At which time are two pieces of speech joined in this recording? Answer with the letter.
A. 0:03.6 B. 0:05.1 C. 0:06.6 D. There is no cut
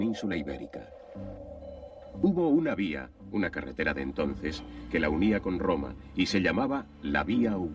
A